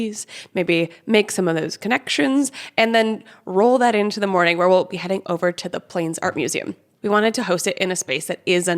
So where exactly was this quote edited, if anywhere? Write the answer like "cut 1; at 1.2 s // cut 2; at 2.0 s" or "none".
cut 1; at 6.8 s